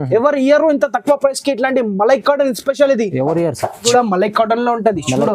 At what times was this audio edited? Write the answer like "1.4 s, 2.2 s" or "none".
3.8 s